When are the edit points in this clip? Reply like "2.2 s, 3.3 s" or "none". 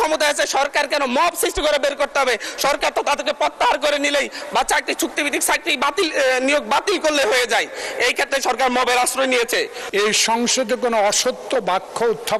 9.8 s